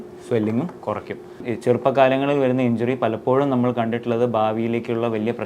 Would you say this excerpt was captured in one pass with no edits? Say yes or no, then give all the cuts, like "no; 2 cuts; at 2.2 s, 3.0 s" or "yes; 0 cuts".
no; 1 cut; at 1.4 s